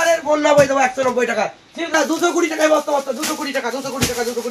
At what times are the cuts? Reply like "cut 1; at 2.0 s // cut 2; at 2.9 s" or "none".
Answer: cut 1; at 1.9 s